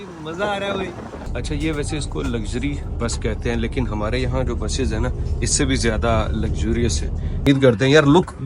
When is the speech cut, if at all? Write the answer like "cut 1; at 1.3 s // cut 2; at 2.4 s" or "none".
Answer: cut 1; at 1.3 s // cut 2; at 7.5 s